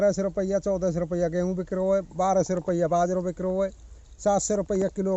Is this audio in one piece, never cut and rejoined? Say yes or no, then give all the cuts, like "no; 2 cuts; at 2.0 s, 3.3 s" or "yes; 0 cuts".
yes; 0 cuts